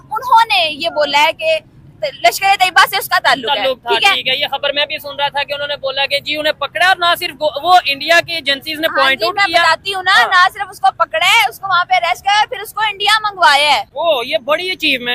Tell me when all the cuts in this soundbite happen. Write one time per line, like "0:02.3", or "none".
none